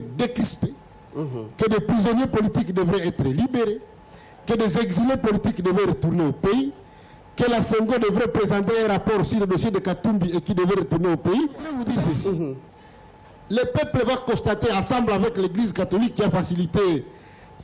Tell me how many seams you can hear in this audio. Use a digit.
1